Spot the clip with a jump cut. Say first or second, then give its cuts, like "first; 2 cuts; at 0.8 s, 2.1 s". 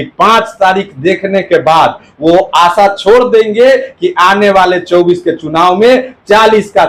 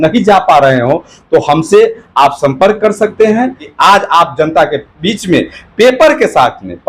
second; 1 cut; at 3.6 s